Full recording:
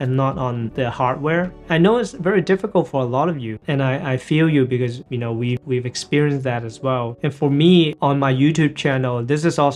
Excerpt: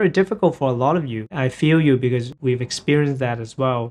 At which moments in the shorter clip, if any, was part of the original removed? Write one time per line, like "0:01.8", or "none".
0:01.3
0:02.3